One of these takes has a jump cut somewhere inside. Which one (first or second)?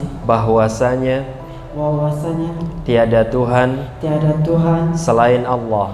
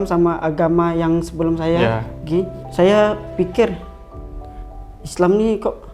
second